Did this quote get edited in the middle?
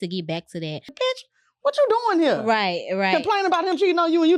yes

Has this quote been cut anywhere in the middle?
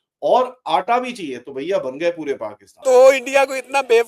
yes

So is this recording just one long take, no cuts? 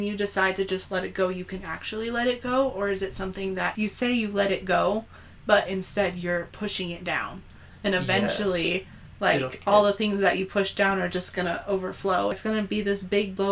no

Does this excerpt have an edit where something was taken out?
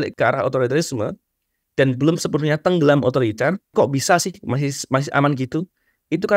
yes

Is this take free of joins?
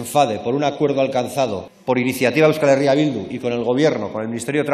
no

